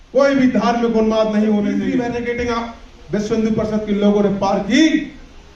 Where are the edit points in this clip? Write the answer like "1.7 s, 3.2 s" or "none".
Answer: 1.9 s